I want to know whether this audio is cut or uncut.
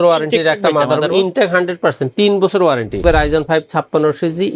cut